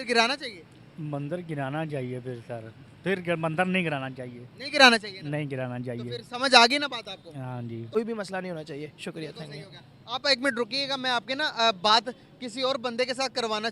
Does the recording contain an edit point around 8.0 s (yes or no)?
yes